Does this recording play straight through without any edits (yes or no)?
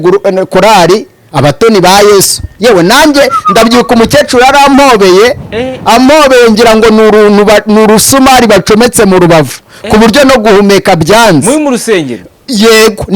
yes